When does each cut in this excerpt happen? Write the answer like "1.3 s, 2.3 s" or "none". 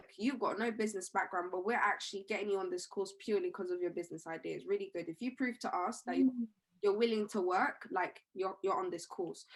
none